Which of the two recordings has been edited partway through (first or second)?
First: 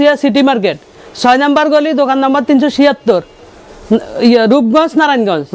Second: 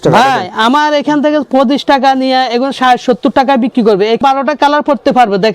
second